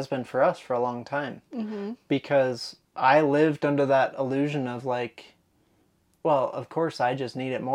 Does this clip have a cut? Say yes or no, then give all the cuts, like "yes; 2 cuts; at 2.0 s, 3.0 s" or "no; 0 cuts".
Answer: no; 0 cuts